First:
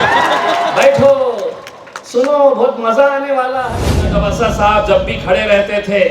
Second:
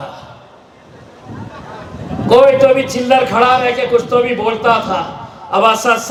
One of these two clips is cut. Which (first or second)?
first